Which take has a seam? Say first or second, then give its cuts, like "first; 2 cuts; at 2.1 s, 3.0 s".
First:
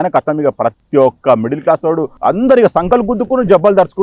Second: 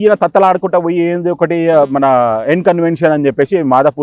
first; 1 cut; at 2.1 s